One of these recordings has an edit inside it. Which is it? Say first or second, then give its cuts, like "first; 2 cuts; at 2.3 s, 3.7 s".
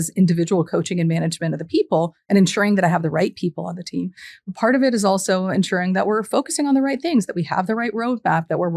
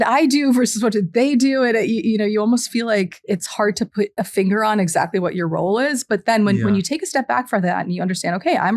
second; 2 cuts; at 3.2 s, 4.1 s